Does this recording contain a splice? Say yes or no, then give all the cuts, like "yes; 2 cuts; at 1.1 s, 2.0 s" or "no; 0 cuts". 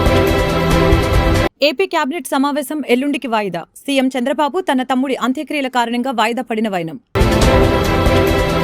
no; 0 cuts